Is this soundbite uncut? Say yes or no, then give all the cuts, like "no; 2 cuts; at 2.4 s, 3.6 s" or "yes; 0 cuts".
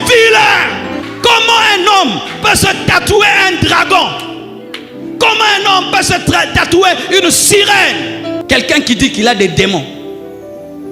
no; 2 cuts; at 0.9 s, 8.4 s